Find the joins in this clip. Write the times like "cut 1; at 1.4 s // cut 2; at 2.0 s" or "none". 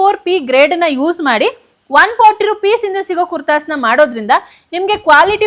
none